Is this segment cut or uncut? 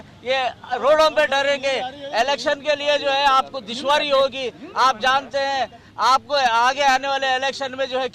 uncut